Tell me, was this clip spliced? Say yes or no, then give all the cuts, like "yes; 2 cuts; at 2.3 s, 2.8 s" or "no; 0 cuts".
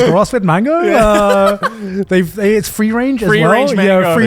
no; 0 cuts